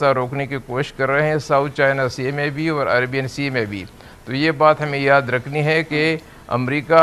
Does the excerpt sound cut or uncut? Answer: uncut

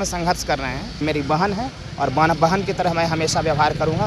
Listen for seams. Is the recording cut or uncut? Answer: cut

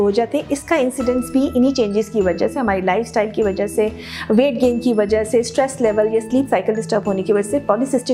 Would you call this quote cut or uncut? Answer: uncut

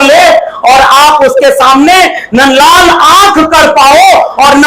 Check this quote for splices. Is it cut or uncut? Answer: uncut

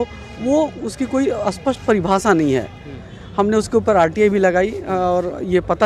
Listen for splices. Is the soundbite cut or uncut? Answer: uncut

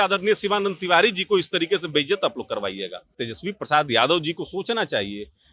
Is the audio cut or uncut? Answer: cut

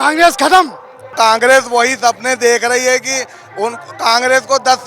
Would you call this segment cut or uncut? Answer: cut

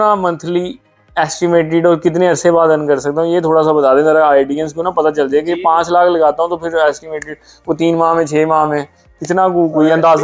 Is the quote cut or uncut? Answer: uncut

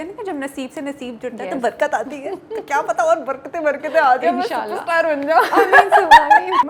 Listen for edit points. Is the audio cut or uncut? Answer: uncut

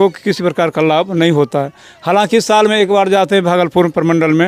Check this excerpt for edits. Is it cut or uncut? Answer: uncut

